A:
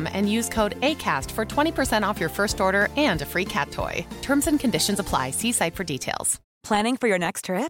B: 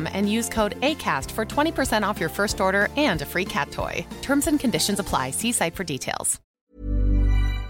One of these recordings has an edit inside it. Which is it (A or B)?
B